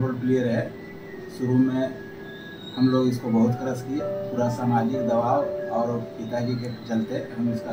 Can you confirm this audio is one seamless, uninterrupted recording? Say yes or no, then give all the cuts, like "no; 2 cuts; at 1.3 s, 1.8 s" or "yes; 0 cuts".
yes; 0 cuts